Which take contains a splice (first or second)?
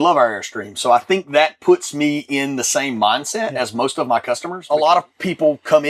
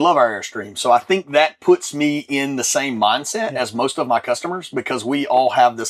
first